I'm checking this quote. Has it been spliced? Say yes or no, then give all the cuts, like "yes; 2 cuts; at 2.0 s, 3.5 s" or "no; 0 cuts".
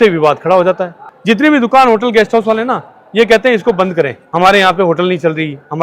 no; 0 cuts